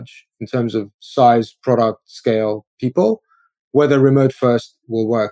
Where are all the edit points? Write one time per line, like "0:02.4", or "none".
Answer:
0:01.0